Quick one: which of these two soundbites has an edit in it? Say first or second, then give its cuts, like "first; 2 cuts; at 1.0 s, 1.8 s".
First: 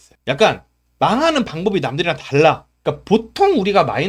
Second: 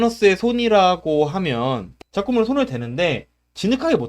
second; 1 cut; at 2.0 s